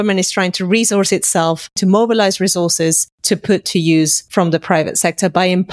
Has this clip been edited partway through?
yes; 3 cuts; at 1.8 s, 3.1 s, 4.2 s

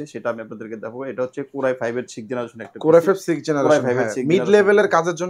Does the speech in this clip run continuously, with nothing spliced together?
yes; 0 cuts

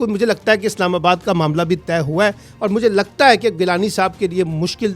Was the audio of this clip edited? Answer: no; 0 cuts

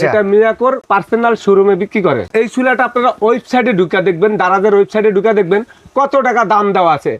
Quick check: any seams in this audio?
yes; 2 cuts; at 0.8 s, 2.3 s

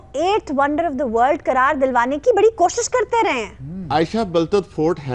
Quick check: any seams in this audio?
no; 0 cuts

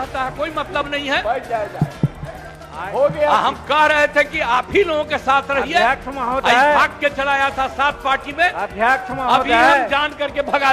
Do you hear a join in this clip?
no; 0 cuts

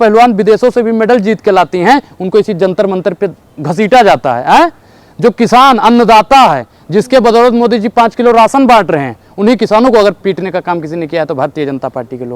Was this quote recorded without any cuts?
yes; 0 cuts

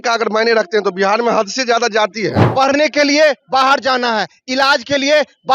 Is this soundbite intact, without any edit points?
no; 1 cut; at 2.4 s

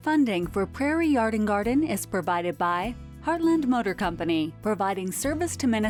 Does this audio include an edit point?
no; 0 cuts

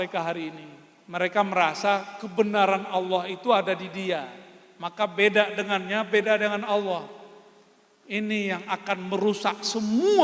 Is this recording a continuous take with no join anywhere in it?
yes; 0 cuts

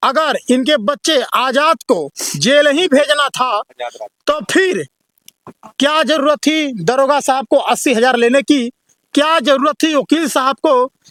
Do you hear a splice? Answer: no; 0 cuts

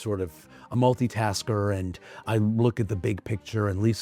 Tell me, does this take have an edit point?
no; 0 cuts

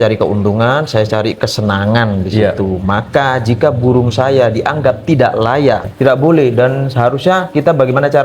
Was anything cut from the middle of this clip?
yes; 1 cut; at 5.9 s

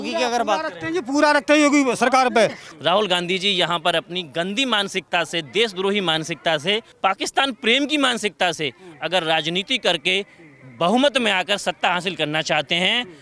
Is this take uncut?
no; 2 cuts; at 2.6 s, 6.9 s

